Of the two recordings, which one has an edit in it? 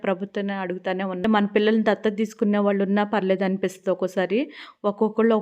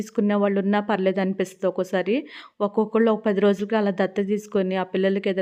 first; 1 cut; at 1.2 s

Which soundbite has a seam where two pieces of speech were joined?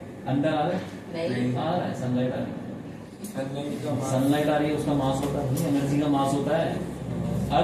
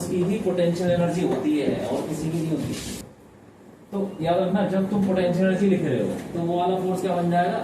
second; 1 cut; at 3.0 s

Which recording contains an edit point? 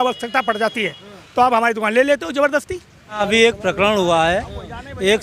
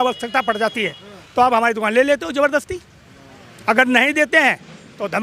first; 1 cut; at 3.2 s

